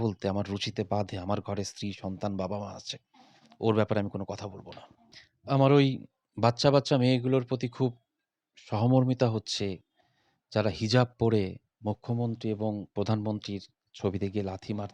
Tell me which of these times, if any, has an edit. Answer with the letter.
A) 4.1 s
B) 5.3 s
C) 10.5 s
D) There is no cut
B